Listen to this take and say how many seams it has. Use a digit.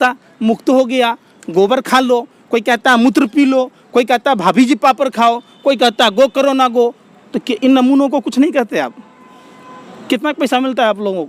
0